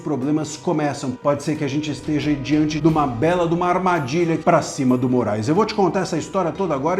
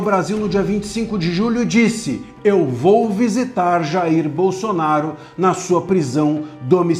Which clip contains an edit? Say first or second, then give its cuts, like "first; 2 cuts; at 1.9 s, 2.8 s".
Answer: first; 3 cuts; at 1.1 s, 2.7 s, 4.4 s